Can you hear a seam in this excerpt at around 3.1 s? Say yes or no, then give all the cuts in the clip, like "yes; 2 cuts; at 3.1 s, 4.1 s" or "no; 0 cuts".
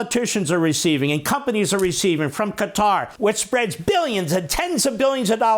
yes; 1 cut; at 3.1 s